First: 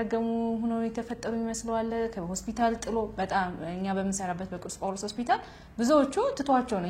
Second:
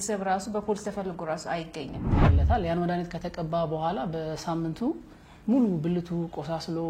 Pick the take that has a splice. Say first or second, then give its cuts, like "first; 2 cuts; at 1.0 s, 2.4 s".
second; 1 cut; at 2.2 s